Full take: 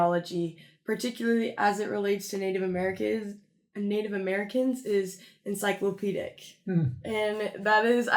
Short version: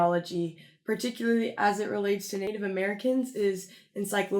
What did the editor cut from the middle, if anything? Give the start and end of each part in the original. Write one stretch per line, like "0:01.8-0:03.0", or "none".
0:02.5-0:04.0

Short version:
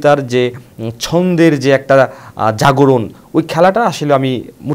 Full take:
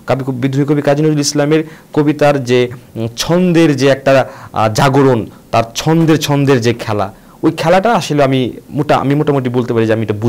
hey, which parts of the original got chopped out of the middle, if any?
0:05.3-0:07.3

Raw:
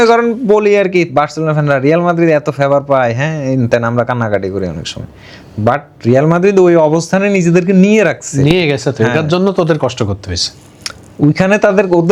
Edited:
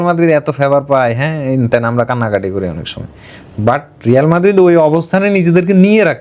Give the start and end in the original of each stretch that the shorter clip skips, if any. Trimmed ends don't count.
none

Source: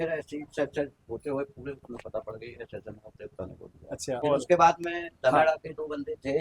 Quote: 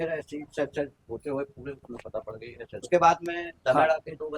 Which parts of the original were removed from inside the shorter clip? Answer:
0:02.9-0:04.4

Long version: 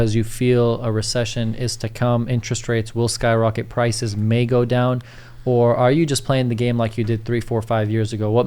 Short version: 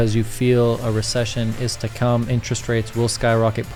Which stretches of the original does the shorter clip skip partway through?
none

